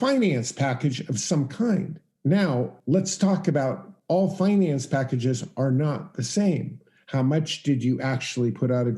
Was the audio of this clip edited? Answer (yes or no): yes